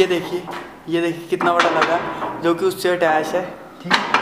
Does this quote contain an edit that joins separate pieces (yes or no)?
no